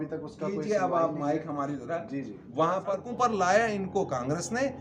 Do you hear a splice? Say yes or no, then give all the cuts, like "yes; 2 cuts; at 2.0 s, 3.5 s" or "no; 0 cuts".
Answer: yes; 1 cut; at 3.0 s